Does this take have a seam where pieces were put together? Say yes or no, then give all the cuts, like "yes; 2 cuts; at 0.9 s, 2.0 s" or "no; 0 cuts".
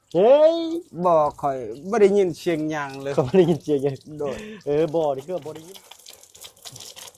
yes; 1 cut; at 5.5 s